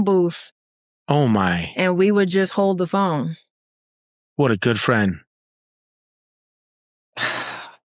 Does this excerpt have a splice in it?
no; 0 cuts

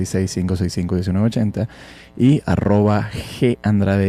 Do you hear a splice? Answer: no; 0 cuts

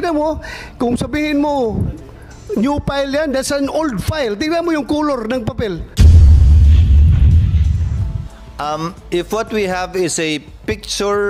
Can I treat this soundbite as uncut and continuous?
no; 2 cuts; at 5.9 s, 8.1 s

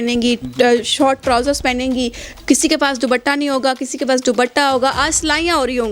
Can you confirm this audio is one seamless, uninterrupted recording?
yes; 0 cuts

